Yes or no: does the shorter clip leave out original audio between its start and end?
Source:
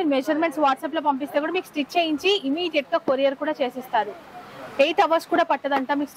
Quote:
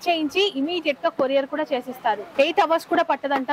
yes